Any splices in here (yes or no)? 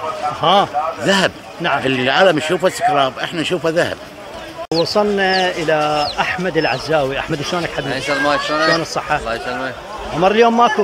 yes